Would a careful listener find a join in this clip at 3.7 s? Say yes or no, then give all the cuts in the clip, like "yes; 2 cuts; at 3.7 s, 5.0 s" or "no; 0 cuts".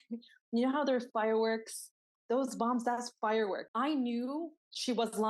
yes; 1 cut; at 3.7 s